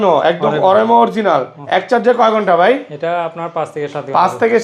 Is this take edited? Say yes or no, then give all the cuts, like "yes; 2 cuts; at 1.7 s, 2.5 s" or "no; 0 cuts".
no; 0 cuts